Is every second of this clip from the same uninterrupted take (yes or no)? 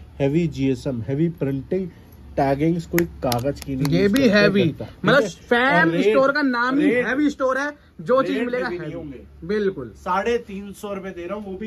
yes